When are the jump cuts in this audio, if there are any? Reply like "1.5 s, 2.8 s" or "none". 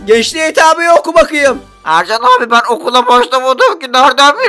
1.7 s